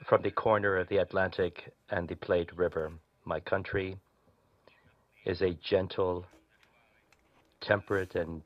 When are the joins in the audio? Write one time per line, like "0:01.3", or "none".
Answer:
none